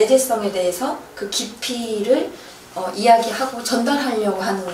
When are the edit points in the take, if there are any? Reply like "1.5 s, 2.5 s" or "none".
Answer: none